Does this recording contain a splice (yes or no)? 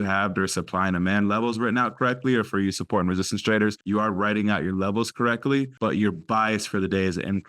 yes